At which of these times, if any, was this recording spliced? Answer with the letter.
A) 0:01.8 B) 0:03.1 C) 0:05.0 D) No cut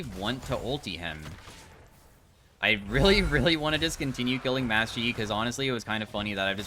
D